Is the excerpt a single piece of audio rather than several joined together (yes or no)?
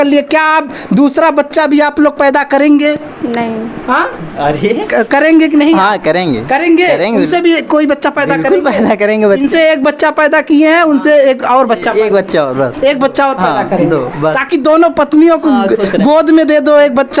yes